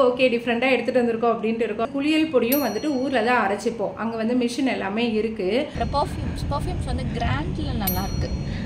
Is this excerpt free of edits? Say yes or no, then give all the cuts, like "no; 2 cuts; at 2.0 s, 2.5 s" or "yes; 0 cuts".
no; 2 cuts; at 1.9 s, 5.7 s